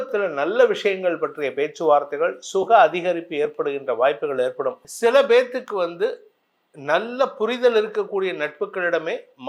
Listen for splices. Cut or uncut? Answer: cut